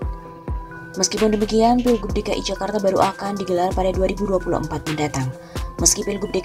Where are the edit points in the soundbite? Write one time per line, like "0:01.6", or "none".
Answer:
0:00.9